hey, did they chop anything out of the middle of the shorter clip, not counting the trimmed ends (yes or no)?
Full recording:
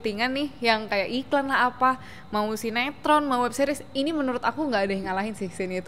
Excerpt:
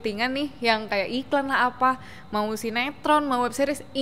no